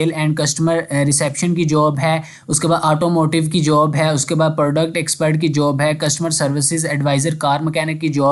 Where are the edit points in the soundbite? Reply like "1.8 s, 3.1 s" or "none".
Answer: none